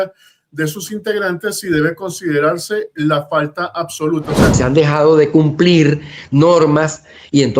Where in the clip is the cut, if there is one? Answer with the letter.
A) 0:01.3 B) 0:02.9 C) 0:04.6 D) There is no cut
C